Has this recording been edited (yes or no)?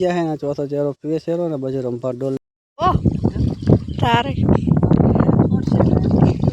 yes